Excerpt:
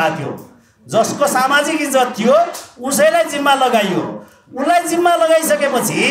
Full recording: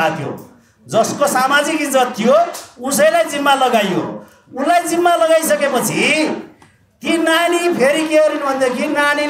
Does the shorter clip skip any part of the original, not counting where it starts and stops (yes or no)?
no